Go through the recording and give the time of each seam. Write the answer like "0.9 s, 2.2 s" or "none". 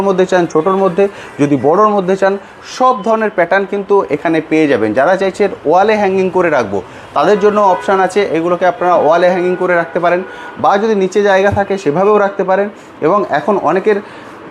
none